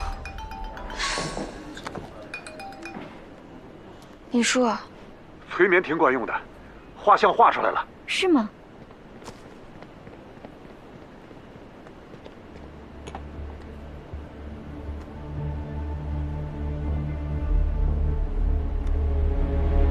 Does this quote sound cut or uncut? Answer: uncut